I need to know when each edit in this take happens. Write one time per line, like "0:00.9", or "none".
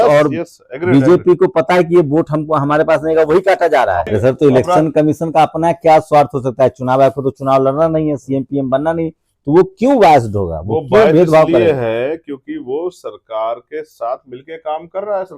0:04.1